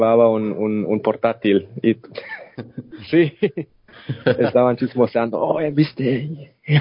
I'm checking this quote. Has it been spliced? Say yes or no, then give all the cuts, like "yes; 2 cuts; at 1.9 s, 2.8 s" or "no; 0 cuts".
yes; 1 cut; at 2.5 s